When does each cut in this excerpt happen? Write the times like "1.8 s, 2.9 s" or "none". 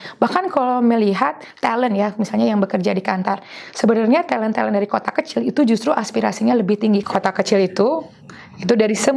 7.0 s